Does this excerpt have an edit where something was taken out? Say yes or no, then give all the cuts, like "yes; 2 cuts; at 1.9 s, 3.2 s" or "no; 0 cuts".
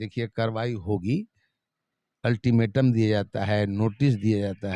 no; 0 cuts